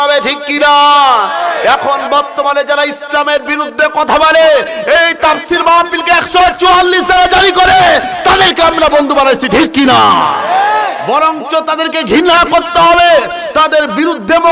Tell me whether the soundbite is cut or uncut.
uncut